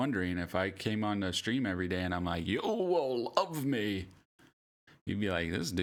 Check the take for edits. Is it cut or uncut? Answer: uncut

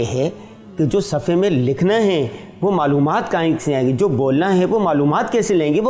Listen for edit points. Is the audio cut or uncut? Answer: uncut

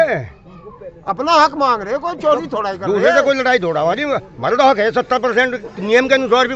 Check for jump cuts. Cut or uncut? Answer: uncut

